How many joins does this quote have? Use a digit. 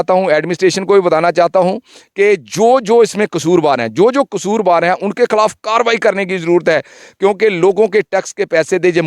0